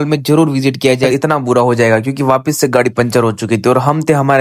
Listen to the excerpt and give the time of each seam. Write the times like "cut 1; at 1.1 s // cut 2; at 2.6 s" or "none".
cut 1; at 1.0 s